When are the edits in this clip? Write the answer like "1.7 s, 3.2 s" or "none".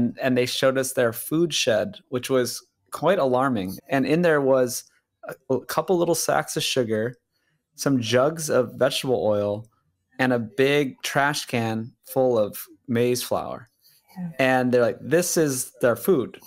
3.7 s